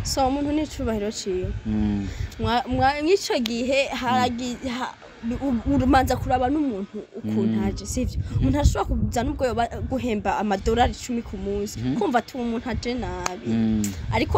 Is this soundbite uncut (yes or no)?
yes